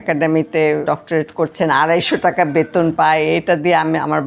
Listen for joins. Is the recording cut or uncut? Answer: uncut